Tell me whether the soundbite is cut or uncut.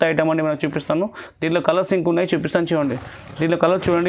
uncut